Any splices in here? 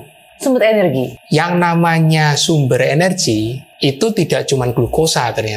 yes; 1 cut; at 1.2 s

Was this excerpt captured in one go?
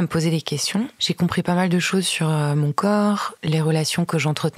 no; 2 cuts; at 0.9 s, 3.3 s

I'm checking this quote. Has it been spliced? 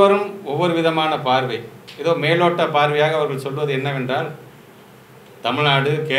no; 0 cuts

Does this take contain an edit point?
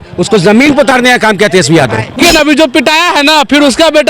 yes; 1 cut; at 2.2 s

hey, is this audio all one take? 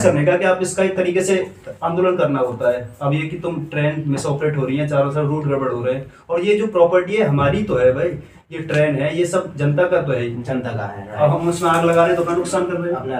yes; 0 cuts

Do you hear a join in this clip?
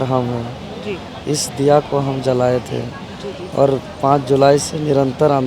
no; 0 cuts

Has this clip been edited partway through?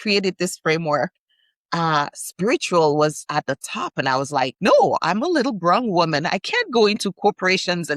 yes; 1 cut; at 4.5 s

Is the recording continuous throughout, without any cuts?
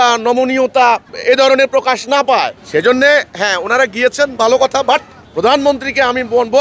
no; 3 cuts; at 1.2 s, 2.6 s, 5.2 s

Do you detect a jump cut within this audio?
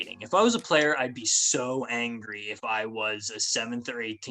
no; 0 cuts

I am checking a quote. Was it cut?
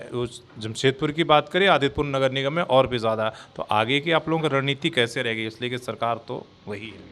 no; 0 cuts

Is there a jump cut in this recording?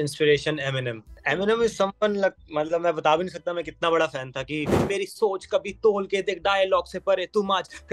yes; 2 cuts; at 1.1 s, 4.8 s

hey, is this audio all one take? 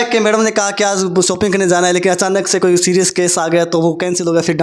yes; 0 cuts

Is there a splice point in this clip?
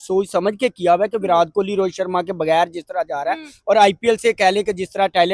no; 0 cuts

